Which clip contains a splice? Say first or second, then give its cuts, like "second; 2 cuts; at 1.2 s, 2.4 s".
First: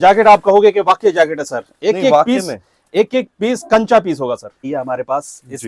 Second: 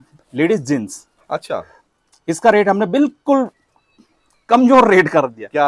first; 1 cut; at 4.7 s